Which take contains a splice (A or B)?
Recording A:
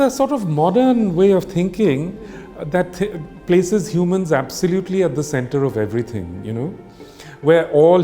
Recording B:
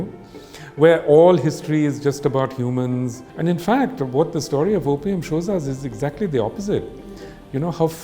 B